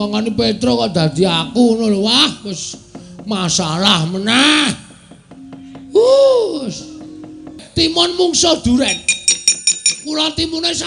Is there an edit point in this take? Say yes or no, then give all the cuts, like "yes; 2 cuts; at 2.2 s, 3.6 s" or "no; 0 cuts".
yes; 1 cut; at 7.6 s